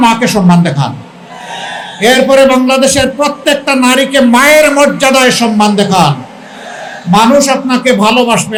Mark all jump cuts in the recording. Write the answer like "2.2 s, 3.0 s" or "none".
none